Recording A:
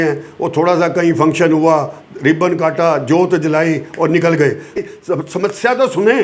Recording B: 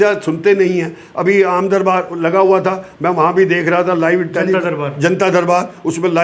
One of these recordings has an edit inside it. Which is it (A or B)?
A